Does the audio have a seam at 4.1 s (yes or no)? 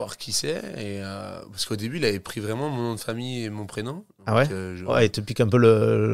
no